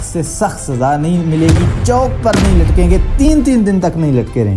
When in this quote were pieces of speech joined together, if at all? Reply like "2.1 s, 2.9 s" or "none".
none